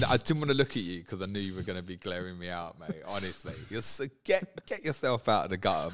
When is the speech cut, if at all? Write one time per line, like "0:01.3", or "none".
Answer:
none